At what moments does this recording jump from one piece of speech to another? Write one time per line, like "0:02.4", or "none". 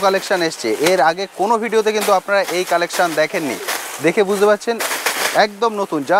none